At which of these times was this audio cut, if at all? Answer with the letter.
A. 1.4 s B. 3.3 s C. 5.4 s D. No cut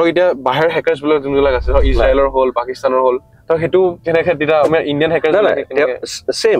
B